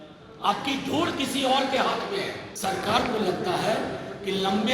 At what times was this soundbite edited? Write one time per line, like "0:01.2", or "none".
0:02.5

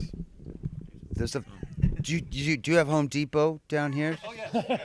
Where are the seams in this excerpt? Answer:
0:01.9

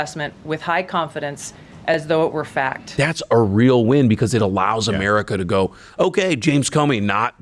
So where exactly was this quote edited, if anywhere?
0:02.8

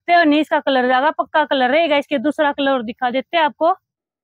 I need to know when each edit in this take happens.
none

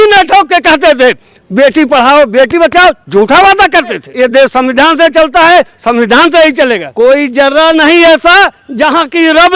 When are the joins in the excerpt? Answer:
0:04.1
0:06.9

